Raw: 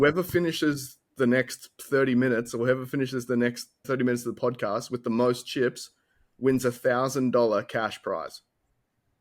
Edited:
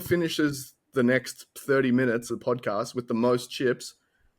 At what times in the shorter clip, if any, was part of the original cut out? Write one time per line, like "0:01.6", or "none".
0:02.3